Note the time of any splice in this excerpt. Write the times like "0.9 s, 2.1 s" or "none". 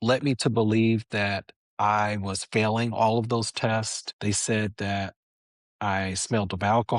4.0 s